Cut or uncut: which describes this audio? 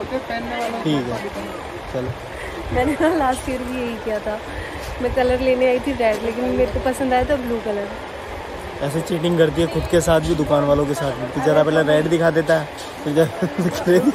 uncut